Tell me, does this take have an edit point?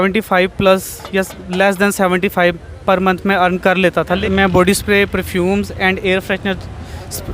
yes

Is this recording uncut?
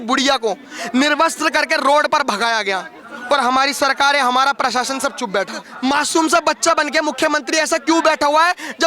no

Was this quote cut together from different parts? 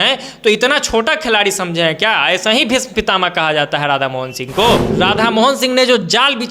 yes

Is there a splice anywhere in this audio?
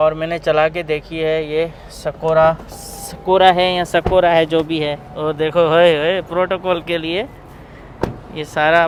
no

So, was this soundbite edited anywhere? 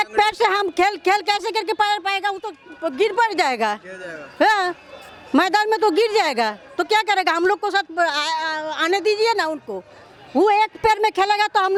no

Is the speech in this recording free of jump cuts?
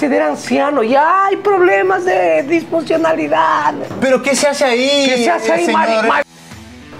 yes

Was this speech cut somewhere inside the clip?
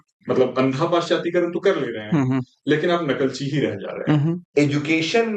yes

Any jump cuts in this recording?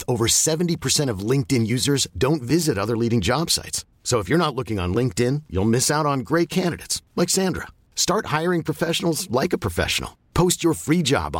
no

